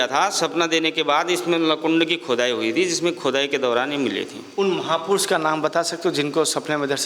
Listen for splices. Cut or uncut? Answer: uncut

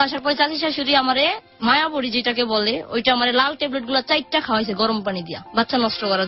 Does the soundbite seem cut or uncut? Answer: uncut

